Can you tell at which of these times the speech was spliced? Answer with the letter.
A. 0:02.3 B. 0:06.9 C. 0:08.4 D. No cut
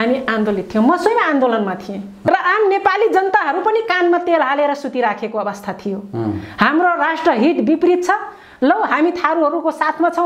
A